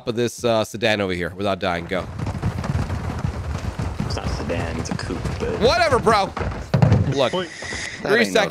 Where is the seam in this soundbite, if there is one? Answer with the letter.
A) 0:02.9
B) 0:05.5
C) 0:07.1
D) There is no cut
C